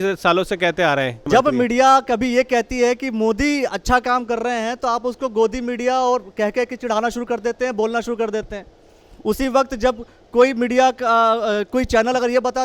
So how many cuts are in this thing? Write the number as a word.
one